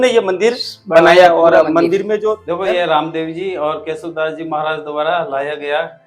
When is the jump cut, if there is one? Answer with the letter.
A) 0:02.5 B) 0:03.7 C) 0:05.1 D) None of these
A